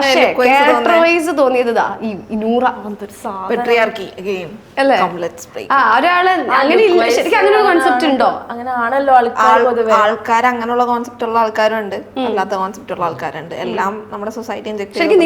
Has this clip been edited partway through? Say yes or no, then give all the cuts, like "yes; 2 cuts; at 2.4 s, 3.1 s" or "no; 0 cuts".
no; 0 cuts